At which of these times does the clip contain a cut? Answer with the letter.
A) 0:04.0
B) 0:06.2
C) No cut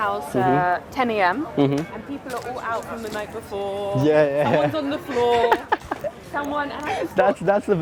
C